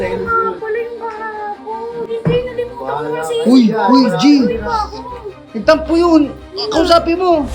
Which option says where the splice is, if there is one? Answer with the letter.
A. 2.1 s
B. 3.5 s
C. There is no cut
A